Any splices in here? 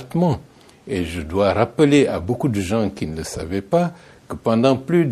no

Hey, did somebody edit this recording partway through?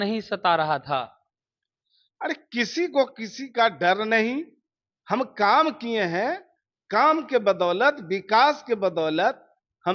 no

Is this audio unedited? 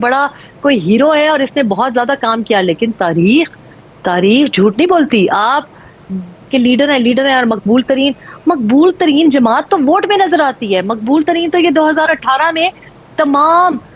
no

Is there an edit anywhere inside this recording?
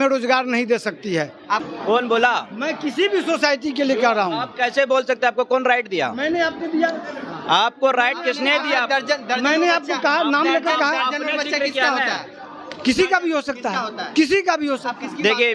no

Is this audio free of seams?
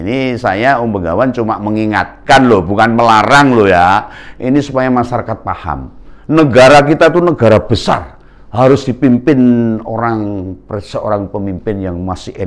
yes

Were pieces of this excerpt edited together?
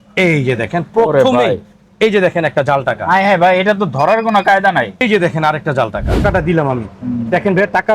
yes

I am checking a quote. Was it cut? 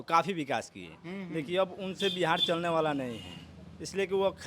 no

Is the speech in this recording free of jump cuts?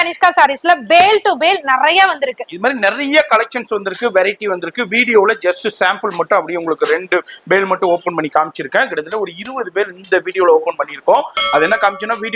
yes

